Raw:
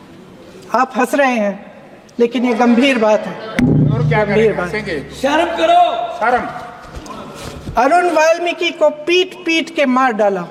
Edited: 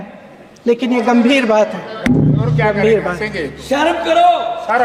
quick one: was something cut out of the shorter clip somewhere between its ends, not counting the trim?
no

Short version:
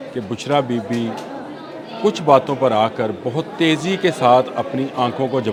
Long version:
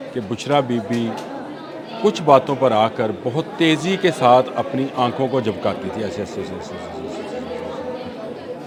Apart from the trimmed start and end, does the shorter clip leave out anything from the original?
no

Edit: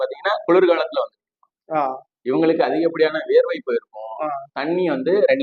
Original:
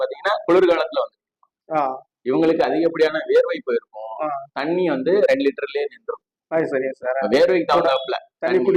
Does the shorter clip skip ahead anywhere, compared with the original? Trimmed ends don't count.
no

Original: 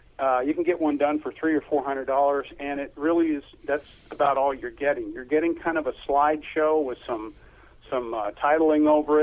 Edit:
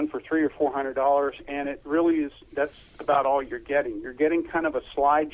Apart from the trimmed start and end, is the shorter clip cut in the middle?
no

